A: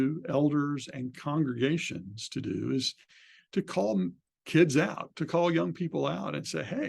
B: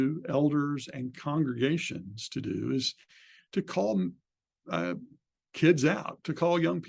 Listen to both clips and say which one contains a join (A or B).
A